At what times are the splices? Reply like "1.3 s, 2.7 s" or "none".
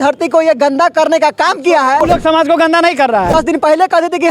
2.0 s, 3.3 s